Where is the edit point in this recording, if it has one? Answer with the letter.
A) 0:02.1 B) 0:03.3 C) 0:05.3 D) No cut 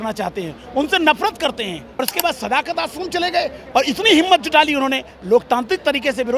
A